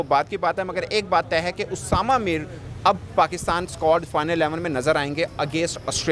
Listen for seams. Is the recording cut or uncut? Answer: uncut